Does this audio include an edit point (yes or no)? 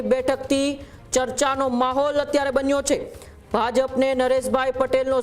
no